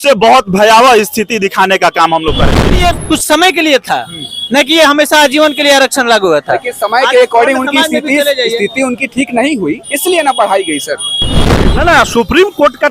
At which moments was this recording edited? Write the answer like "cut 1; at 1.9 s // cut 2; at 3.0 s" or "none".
cut 1; at 2.8 s // cut 2; at 11.4 s